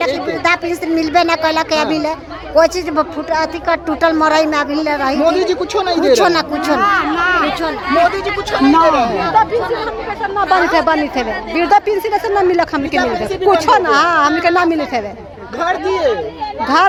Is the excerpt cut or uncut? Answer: uncut